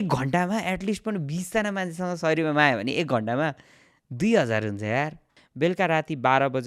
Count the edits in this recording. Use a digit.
1